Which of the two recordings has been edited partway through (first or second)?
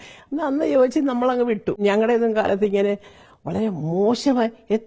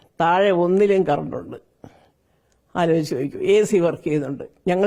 first